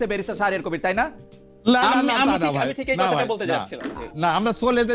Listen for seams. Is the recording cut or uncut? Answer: uncut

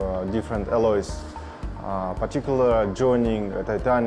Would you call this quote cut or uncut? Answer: uncut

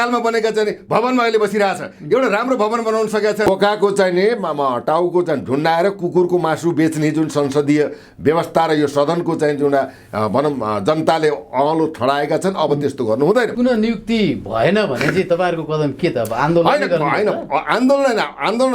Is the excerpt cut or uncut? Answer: cut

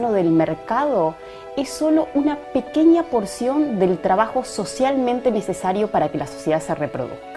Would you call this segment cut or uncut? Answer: uncut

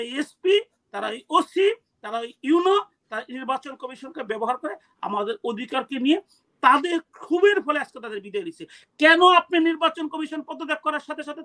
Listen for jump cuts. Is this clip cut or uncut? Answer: uncut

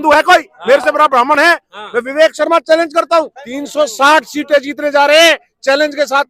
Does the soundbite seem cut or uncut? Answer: cut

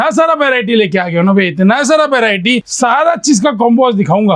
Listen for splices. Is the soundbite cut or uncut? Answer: cut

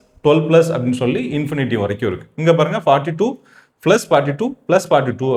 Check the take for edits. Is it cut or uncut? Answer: uncut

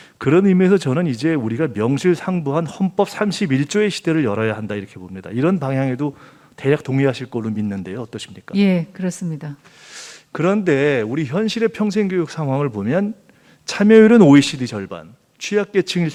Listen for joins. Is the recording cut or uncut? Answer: uncut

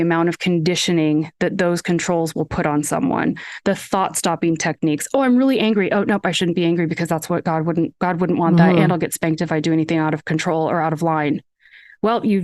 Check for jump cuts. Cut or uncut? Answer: uncut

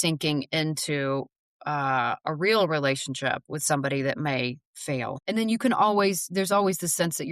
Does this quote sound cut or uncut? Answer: cut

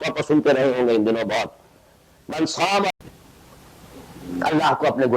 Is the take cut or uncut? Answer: cut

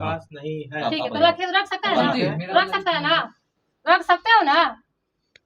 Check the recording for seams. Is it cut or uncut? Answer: uncut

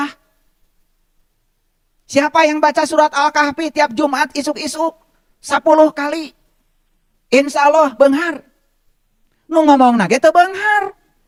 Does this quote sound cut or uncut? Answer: uncut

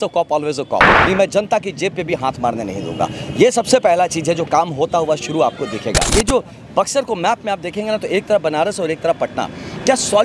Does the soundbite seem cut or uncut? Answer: cut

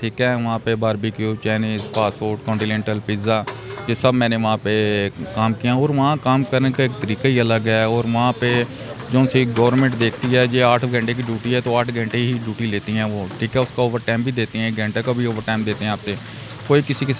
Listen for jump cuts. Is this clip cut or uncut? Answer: uncut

